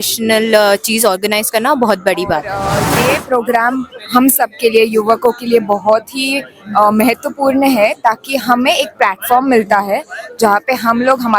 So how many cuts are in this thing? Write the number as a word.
one